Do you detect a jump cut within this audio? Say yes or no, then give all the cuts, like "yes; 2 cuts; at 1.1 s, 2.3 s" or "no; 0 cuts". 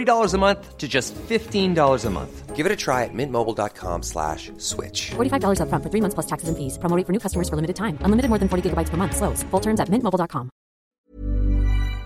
yes; 1 cut; at 10.9 s